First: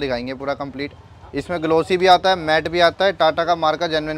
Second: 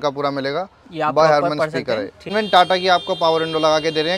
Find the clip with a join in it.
second; 1 cut; at 2.3 s

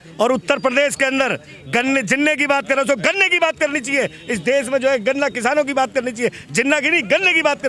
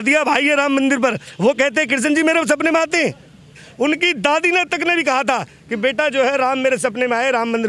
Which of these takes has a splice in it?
second; 1 cut; at 3.6 s

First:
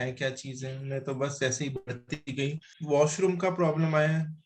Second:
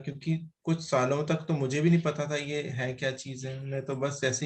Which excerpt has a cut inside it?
first; 1 cut; at 2.7 s

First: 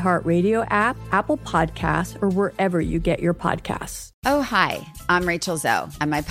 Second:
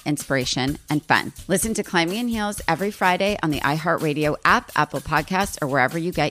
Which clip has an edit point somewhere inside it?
first; 1 cut; at 1.0 s

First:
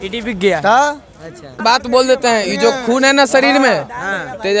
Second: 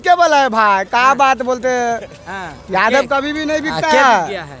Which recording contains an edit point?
first; 1 cut; at 1.6 s

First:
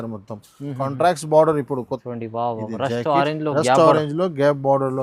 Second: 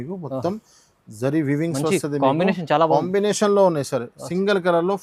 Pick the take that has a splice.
first; 1 cut; at 2.0 s

